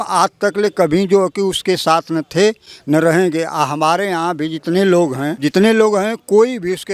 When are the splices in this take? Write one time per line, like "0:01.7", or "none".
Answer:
none